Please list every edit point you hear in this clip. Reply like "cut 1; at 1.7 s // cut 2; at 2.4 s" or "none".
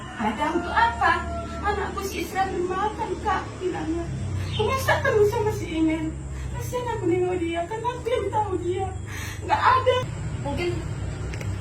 cut 1; at 10.0 s